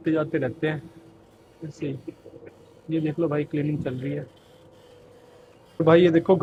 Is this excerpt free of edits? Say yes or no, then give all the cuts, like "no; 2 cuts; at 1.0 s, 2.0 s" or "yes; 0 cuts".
yes; 0 cuts